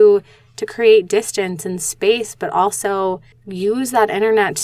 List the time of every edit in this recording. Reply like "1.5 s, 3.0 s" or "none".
none